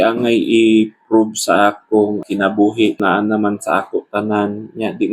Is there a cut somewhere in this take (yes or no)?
yes